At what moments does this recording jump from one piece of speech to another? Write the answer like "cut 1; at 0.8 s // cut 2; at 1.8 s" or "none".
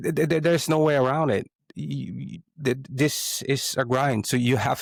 none